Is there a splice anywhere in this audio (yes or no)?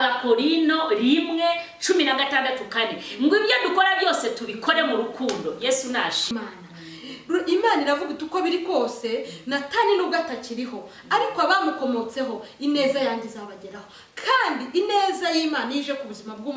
yes